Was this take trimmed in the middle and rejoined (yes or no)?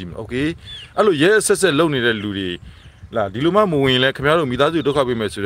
no